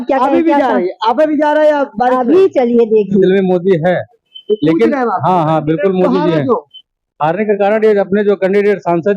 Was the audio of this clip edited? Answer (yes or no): yes